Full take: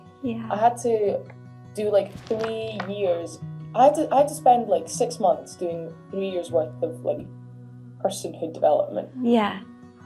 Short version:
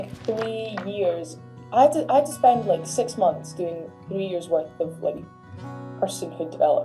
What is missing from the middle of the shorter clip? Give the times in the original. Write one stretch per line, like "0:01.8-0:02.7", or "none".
none